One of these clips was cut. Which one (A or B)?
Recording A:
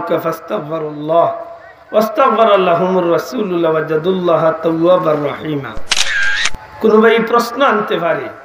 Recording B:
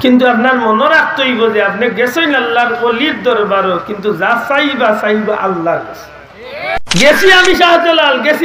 B